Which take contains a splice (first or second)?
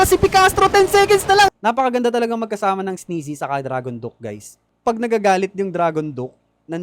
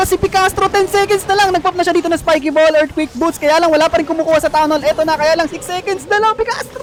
first